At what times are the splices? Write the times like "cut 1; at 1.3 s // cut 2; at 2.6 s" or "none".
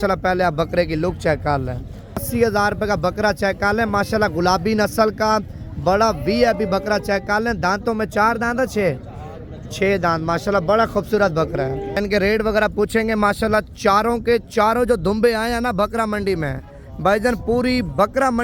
cut 1; at 2.3 s // cut 2; at 12.0 s